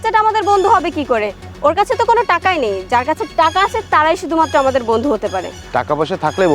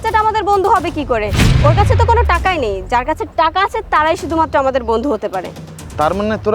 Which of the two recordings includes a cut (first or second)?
first